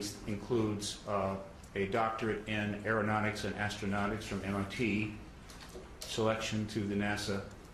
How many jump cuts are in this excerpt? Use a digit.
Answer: 1